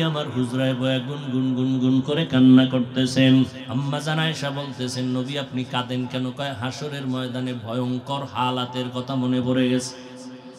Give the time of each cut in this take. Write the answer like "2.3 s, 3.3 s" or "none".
3.6 s